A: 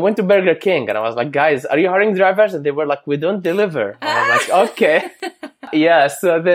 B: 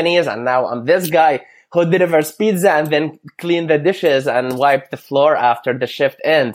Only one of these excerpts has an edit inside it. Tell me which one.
A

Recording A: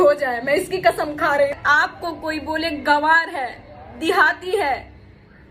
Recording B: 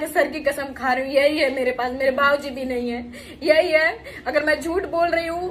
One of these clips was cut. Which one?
A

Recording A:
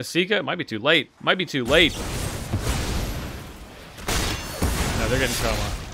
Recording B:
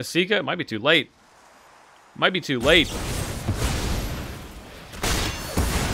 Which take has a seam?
A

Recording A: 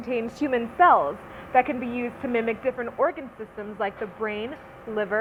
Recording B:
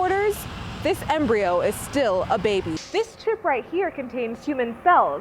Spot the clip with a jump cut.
B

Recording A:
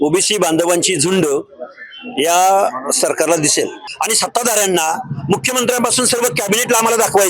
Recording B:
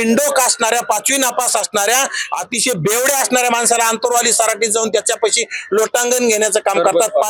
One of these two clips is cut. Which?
A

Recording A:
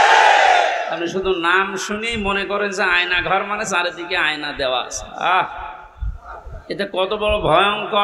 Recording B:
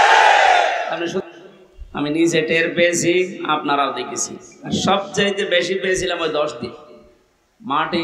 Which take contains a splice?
B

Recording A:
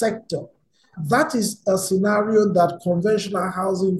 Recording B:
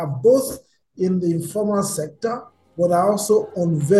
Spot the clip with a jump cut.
A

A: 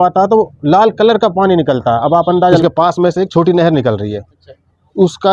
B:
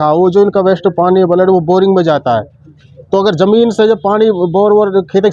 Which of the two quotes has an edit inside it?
A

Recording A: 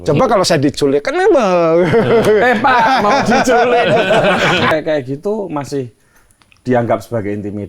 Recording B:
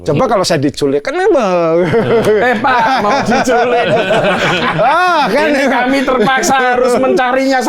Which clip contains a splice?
A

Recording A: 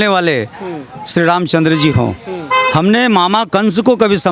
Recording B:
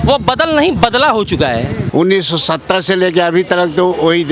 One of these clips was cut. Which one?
B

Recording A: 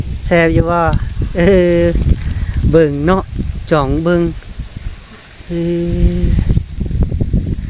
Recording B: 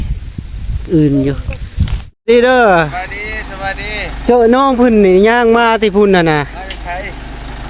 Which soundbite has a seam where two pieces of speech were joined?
B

